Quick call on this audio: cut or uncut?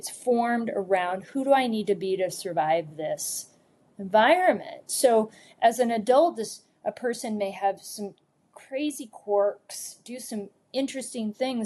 uncut